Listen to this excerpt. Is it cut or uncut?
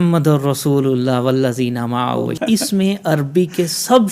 cut